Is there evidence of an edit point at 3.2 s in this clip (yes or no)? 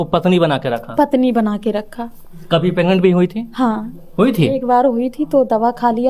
no